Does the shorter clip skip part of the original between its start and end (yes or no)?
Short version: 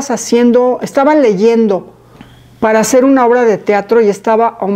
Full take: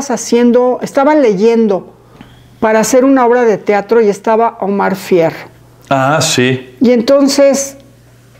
no